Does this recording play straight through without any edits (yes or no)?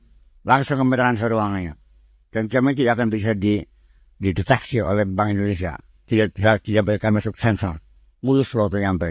yes